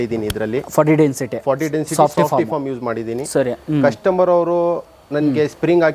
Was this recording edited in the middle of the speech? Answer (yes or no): no